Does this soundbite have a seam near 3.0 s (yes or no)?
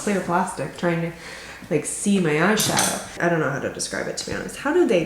yes